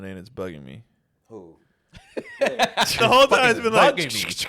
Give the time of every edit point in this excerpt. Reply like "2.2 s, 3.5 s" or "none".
3.0 s